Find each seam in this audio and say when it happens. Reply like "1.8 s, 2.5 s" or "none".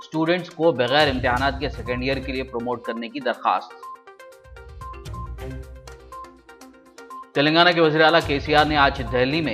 none